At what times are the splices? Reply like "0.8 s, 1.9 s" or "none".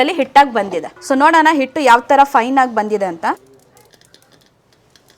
0.9 s, 3.4 s